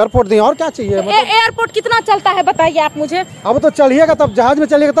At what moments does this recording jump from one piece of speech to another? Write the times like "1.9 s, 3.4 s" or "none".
none